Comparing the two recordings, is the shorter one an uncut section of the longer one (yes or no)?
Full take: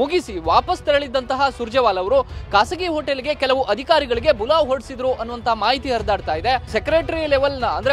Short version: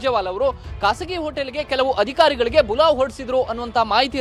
yes